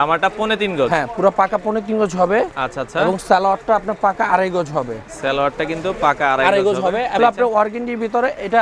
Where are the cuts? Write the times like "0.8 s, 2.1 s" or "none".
7.2 s